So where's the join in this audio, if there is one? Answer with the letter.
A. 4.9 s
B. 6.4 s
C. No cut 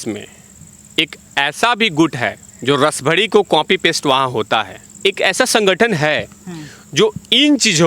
A